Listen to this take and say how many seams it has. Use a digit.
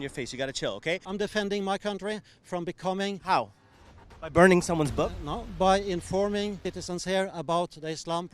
2